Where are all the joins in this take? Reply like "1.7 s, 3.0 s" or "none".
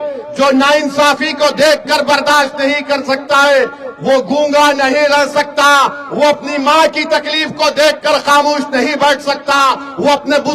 none